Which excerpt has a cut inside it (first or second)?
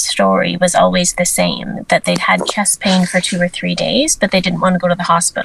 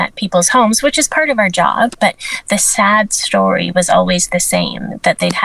second